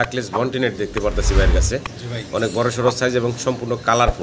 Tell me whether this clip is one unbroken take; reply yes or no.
yes